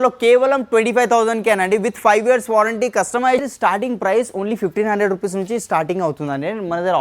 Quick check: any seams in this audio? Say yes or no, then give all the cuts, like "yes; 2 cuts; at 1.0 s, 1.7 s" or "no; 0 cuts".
yes; 1 cut; at 3.4 s